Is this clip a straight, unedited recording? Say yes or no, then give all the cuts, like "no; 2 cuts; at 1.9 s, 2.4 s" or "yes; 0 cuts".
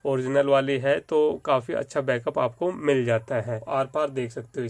no; 1 cut; at 3.6 s